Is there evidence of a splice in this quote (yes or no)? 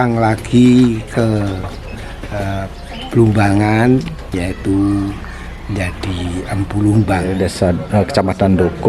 yes